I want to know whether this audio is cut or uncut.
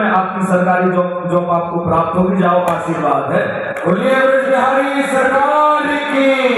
uncut